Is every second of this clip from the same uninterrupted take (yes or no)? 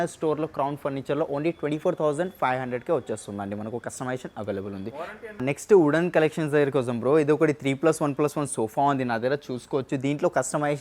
no